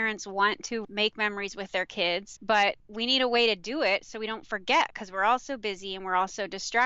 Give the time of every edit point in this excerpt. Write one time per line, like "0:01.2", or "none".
0:00.8
0:02.3
0:02.9